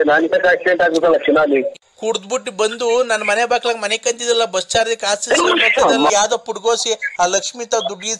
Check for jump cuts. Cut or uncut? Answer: cut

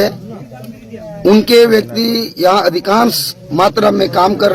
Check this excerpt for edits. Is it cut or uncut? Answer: uncut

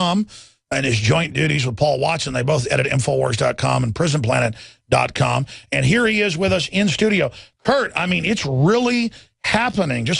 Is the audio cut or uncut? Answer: cut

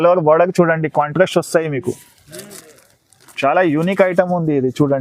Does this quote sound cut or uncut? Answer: uncut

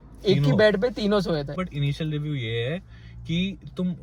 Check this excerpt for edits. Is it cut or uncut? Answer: cut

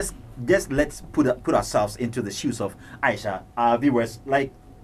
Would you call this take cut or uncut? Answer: uncut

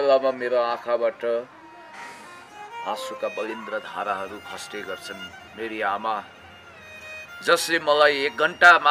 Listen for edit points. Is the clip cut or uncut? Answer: uncut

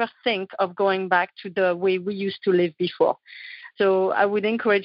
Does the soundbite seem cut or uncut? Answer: uncut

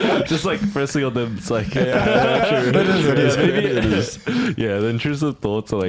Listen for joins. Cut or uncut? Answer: uncut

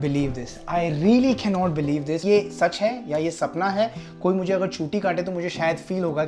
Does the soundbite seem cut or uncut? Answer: uncut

